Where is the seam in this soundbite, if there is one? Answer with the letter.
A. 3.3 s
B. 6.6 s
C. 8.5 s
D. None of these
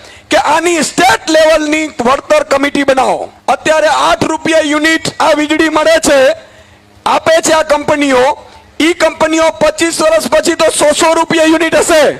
A